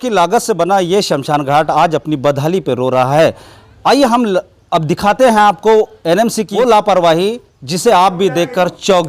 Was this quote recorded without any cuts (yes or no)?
no